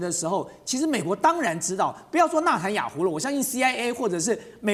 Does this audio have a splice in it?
no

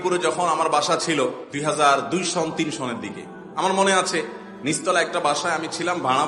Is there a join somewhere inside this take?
yes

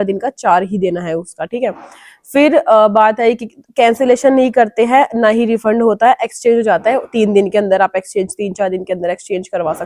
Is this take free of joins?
yes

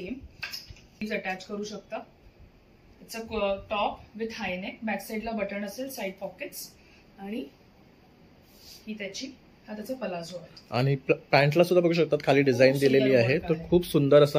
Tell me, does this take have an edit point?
yes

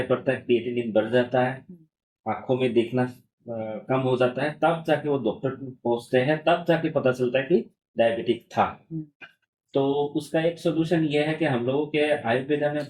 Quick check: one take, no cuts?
yes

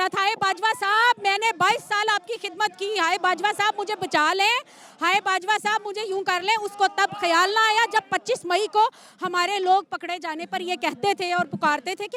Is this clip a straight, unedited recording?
yes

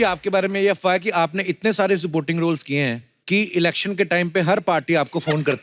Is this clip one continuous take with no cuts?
no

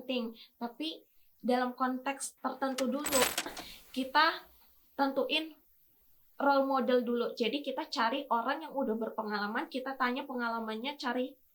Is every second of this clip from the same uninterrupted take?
no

